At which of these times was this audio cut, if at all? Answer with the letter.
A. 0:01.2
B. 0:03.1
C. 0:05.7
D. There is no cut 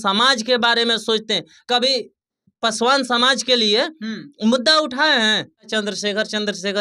C